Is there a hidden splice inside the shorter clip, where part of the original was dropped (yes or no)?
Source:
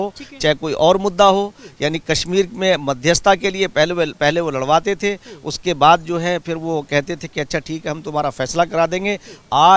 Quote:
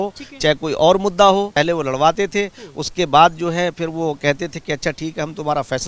yes